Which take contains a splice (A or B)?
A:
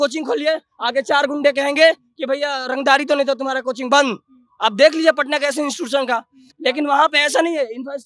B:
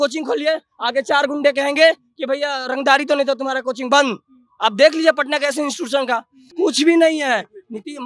B